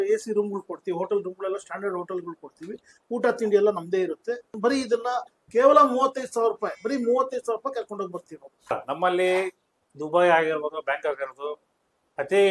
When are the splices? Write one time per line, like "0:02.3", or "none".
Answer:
0:04.5
0:08.7